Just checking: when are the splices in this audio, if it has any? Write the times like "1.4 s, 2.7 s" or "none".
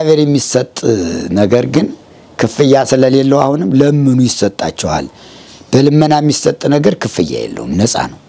none